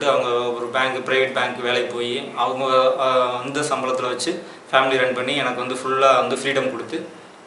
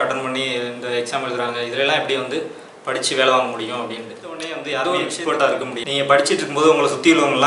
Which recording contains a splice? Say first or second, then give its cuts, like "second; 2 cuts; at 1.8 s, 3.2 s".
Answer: second; 2 cuts; at 4.8 s, 5.8 s